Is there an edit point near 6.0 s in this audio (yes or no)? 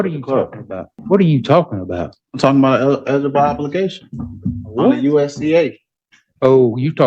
no